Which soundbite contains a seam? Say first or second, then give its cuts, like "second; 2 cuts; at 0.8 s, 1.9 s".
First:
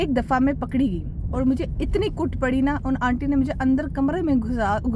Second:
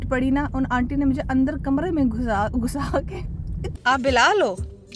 second; 1 cut; at 3.6 s